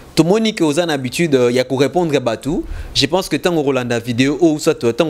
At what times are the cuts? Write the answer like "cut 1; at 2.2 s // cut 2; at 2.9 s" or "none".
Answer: none

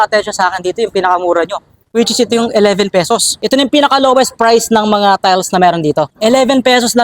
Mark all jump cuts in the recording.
cut 1; at 3.3 s // cut 2; at 6.1 s

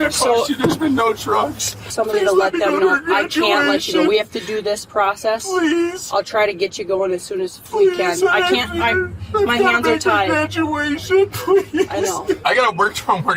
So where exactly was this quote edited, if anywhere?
cut 1; at 1.9 s // cut 2; at 12.4 s

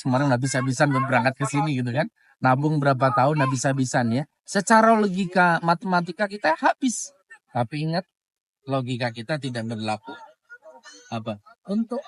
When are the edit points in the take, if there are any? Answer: none

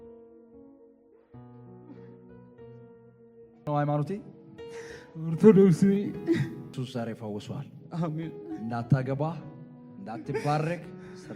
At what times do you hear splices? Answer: cut 1; at 3.7 s // cut 2; at 6.7 s

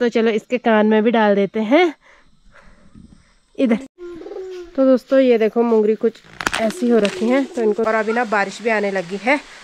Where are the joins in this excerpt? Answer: cut 1; at 3.9 s // cut 2; at 7.9 s

